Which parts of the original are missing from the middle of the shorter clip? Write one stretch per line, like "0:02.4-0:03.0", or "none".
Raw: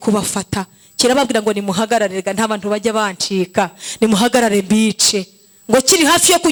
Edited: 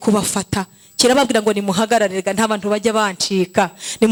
none